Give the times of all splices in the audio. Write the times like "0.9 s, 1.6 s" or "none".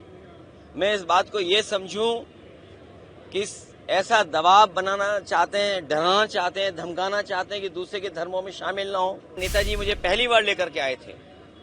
9.4 s